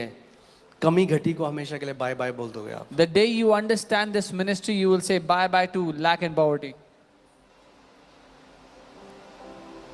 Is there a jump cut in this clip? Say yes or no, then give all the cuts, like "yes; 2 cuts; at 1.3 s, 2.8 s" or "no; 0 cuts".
no; 0 cuts